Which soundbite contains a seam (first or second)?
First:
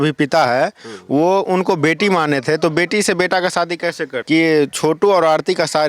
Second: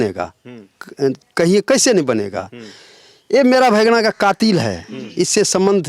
first